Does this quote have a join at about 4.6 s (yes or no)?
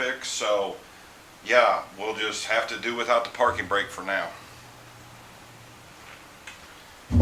no